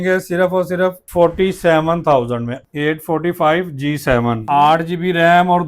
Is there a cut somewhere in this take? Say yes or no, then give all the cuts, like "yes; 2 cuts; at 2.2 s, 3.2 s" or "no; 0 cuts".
yes; 3 cuts; at 1.0 s, 2.6 s, 4.4 s